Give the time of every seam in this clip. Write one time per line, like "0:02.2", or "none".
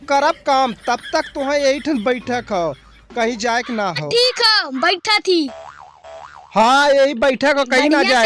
0:04.0